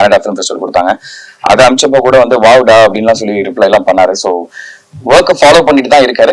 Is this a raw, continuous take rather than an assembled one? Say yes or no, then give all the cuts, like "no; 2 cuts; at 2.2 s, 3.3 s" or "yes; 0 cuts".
yes; 0 cuts